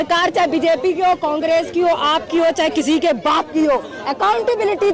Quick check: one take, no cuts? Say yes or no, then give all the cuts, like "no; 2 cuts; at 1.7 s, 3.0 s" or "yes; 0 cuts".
yes; 0 cuts